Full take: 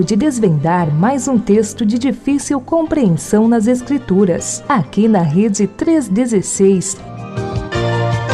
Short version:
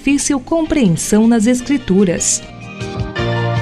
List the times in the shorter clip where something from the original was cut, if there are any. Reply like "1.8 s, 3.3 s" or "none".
2.3 s